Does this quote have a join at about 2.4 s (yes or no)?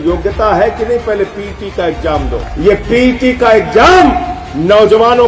yes